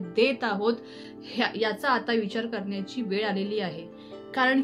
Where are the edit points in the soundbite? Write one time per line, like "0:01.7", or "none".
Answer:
none